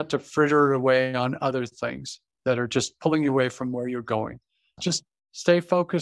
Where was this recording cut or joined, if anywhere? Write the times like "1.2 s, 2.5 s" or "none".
4.7 s